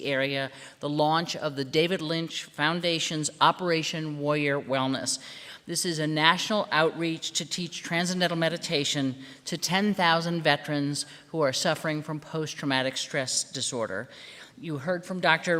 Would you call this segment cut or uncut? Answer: uncut